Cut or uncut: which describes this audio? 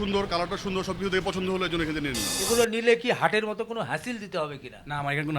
cut